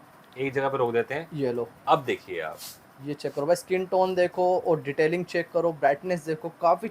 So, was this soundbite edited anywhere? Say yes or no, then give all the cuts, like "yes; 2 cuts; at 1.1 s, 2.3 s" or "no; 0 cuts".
no; 0 cuts